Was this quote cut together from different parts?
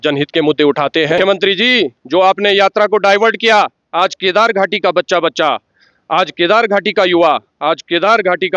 yes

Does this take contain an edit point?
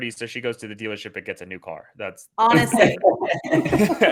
no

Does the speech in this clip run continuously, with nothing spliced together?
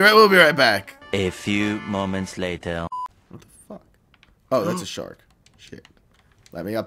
no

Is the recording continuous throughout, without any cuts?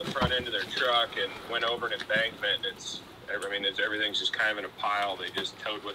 yes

